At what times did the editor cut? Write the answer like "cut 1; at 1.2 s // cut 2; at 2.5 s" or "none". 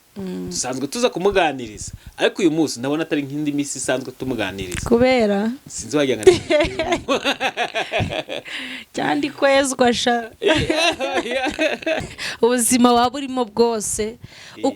cut 1; at 12.0 s